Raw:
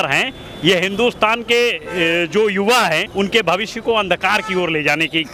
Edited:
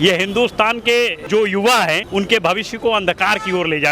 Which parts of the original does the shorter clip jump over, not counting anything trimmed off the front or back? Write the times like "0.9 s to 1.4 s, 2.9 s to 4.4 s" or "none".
1.9 s to 2.3 s